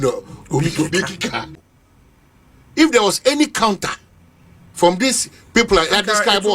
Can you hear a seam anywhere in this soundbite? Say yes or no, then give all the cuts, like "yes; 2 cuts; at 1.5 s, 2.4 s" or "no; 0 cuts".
yes; 1 cut; at 1.6 s